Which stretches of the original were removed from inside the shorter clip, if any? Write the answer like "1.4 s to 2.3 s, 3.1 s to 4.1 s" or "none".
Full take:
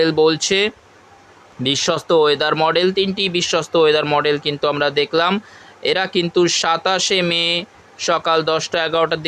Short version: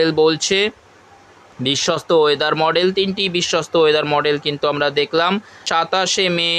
5.6 s to 6.6 s